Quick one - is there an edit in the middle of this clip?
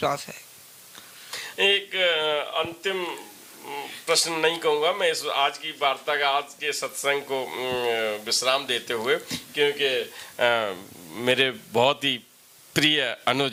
no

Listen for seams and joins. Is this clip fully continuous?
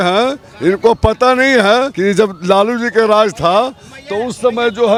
yes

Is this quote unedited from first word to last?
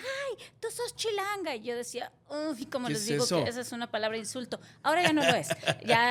yes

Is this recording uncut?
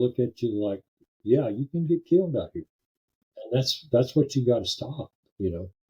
no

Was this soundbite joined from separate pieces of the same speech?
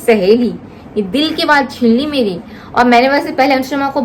no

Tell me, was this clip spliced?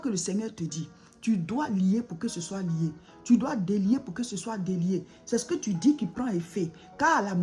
yes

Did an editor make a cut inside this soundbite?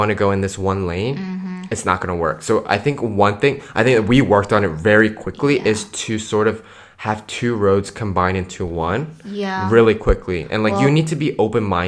no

